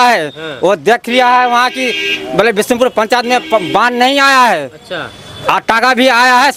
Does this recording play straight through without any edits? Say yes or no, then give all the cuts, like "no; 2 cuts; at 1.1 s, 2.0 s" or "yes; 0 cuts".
yes; 0 cuts